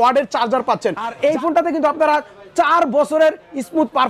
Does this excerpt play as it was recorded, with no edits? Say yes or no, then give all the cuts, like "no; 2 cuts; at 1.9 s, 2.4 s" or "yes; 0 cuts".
no; 1 cut; at 1.1 s